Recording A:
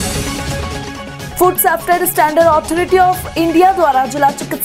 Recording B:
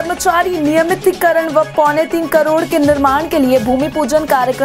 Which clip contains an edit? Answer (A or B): A